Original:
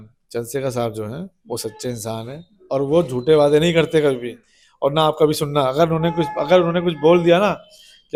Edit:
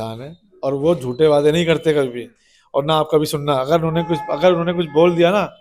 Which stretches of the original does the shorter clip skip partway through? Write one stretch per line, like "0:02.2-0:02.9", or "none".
none